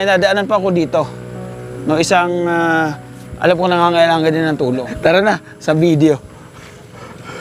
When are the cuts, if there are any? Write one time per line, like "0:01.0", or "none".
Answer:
0:04.9